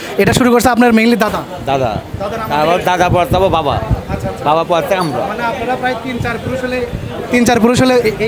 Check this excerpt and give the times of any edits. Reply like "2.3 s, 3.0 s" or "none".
none